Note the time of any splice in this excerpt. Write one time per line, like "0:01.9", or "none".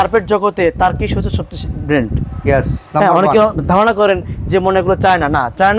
none